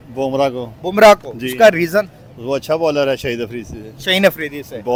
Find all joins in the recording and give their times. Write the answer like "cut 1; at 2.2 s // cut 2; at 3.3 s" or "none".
none